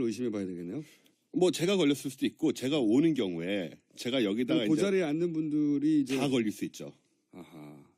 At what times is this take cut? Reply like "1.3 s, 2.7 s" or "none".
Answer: none